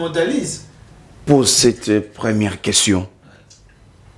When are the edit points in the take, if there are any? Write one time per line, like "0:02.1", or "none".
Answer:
0:01.2